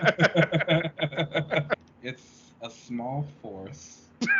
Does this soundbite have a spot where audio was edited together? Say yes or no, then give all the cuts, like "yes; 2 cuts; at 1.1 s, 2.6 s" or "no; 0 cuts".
yes; 1 cut; at 1.7 s